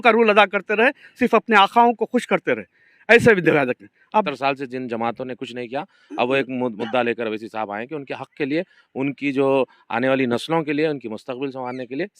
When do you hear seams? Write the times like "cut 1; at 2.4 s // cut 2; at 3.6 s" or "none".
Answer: cut 1; at 3.9 s